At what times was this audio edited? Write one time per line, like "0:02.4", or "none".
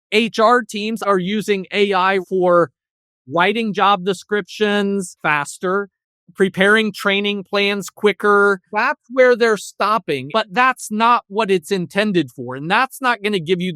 0:01.1
0:02.2
0:05.1
0:08.7
0:10.2